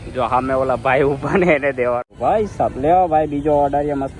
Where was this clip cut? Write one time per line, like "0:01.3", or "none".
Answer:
0:02.1